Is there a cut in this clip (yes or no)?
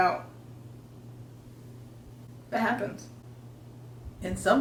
no